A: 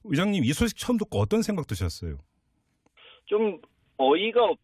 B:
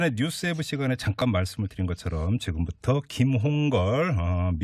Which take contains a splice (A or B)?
A